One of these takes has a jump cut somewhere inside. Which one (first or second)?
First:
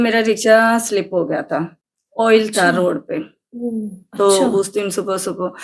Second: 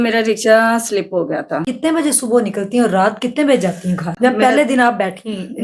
second